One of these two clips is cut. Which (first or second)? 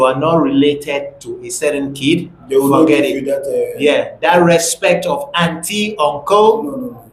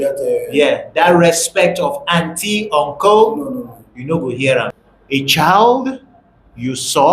second